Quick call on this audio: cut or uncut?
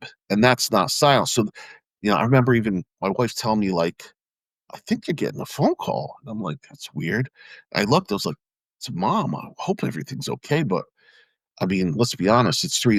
uncut